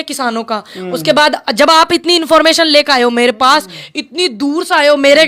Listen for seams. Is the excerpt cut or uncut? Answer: uncut